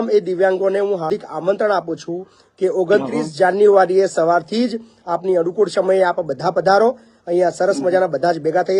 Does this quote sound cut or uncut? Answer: cut